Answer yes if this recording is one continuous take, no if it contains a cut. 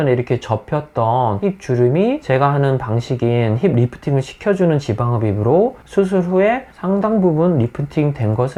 yes